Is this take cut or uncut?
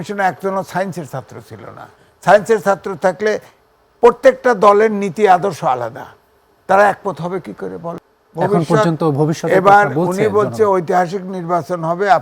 cut